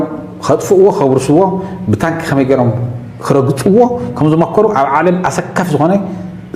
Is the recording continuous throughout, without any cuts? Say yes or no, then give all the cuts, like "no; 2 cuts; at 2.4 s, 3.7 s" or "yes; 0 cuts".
yes; 0 cuts